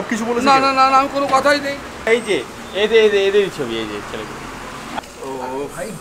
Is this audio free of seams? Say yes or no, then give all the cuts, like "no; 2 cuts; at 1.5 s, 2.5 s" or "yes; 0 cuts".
no; 2 cuts; at 2.1 s, 4.8 s